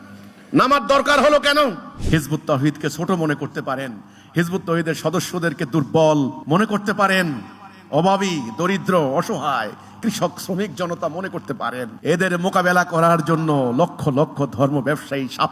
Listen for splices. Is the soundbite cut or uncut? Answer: cut